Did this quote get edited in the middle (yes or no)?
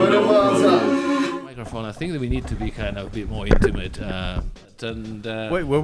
yes